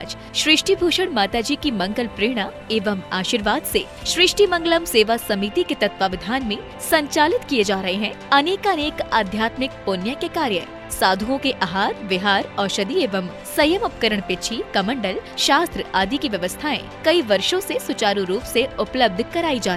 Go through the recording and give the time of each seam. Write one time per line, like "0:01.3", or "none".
none